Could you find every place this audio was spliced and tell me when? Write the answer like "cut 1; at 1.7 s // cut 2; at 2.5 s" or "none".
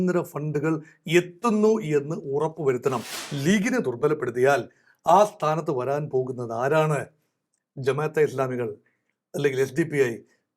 cut 1; at 3.2 s